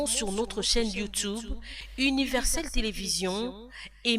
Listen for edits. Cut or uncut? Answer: uncut